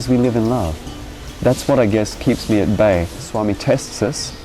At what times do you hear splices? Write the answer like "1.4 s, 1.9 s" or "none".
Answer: 3.3 s